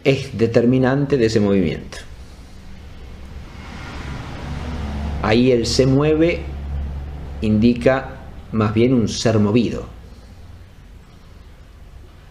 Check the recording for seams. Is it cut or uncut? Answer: uncut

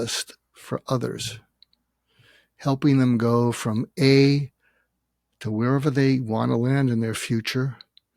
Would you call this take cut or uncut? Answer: uncut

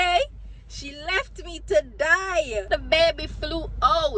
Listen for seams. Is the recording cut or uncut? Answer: cut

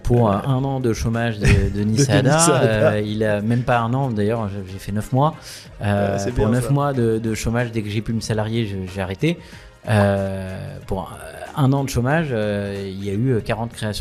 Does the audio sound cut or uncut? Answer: uncut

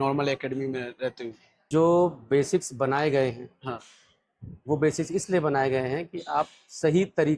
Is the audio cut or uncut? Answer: cut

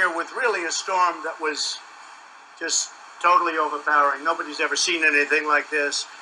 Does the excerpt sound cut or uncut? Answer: uncut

